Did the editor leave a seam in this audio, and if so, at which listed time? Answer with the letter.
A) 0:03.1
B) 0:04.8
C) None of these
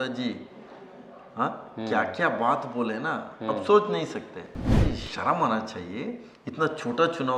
B